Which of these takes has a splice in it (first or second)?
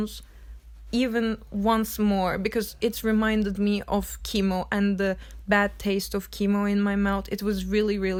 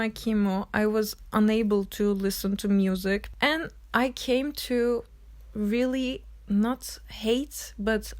second